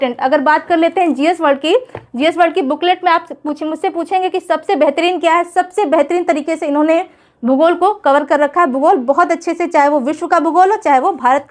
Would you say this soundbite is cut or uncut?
uncut